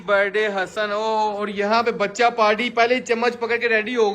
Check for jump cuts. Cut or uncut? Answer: uncut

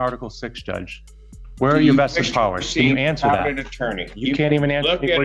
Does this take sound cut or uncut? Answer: uncut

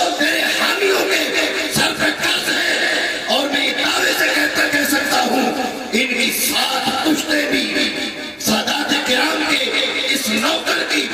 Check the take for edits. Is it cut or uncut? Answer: uncut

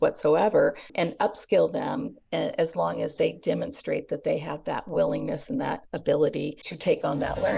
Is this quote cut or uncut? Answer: cut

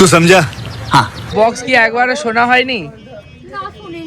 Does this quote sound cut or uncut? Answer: cut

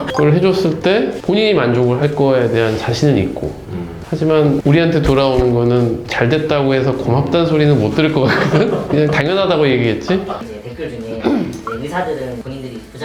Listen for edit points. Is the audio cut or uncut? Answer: cut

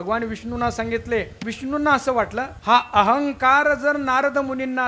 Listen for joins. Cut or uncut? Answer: cut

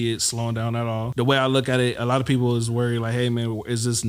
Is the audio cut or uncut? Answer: cut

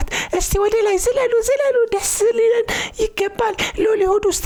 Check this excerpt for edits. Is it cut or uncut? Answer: uncut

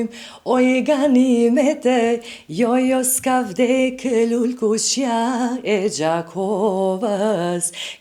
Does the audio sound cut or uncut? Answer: uncut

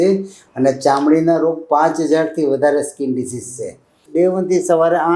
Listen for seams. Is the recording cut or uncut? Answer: cut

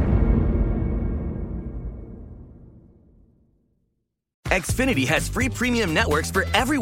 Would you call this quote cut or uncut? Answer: cut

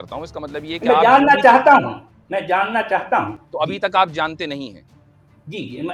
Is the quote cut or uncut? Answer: uncut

